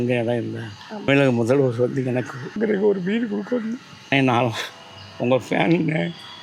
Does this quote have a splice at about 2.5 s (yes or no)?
yes